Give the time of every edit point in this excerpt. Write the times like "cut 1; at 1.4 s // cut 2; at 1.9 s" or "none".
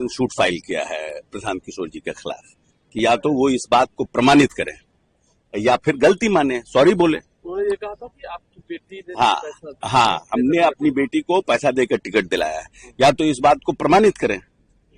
none